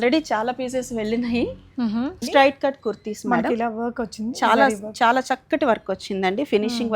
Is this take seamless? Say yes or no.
no